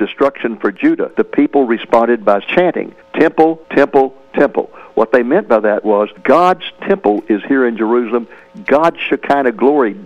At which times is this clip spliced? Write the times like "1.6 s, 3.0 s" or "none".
1.1 s